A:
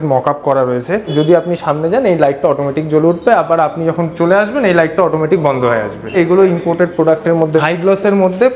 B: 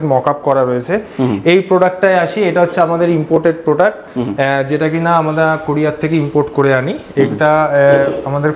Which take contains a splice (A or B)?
A